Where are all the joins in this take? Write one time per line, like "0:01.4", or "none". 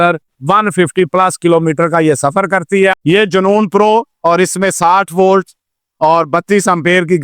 0:02.9
0:04.1